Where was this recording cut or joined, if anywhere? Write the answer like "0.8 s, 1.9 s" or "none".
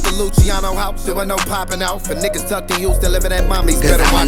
none